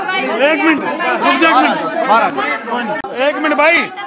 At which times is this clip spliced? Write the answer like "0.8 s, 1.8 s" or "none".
3.0 s